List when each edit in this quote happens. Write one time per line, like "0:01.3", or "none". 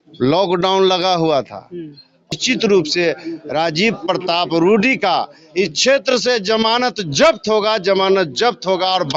0:02.3